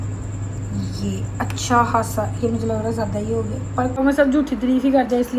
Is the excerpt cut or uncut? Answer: cut